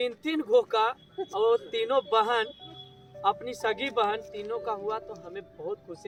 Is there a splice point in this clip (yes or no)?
no